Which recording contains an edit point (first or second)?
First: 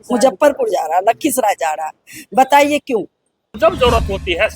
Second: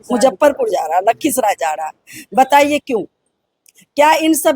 first